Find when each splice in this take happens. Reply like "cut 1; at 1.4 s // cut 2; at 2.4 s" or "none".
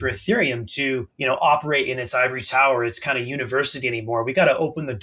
cut 1; at 1.1 s

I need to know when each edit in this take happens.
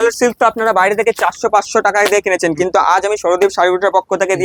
none

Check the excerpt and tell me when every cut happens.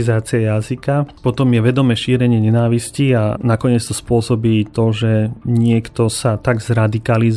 none

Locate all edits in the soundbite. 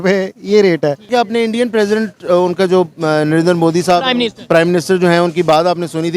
cut 1; at 1.1 s

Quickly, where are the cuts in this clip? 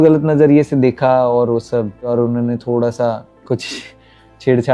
cut 1; at 2.1 s

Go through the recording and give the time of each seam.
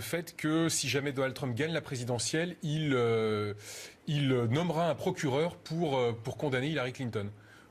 cut 1; at 5.5 s

